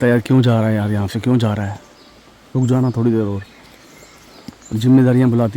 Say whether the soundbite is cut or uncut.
uncut